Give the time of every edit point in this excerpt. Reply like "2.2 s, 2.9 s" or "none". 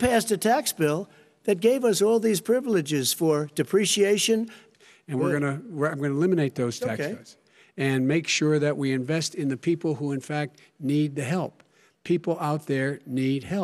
4.6 s